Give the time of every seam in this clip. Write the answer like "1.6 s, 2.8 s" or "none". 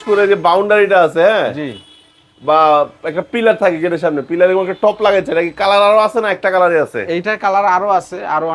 none